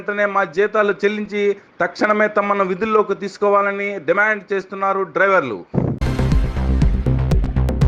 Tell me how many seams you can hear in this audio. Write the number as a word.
one